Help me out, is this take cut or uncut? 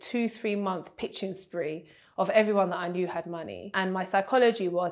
uncut